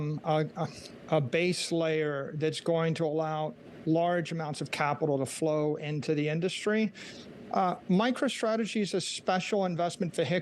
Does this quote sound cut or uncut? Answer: uncut